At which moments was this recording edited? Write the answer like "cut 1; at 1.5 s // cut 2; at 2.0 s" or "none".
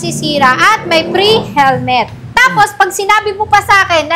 cut 1; at 2.2 s